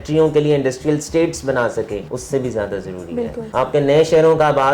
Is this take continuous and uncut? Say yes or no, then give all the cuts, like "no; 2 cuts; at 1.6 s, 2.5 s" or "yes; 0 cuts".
no; 2 cuts; at 2.1 s, 3.4 s